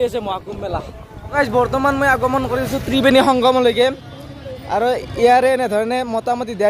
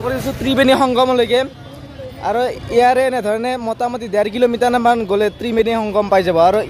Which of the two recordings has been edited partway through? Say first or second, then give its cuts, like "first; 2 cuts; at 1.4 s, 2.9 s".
first; 1 cut; at 1.3 s